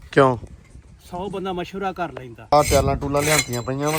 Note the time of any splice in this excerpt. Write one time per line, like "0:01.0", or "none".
0:02.5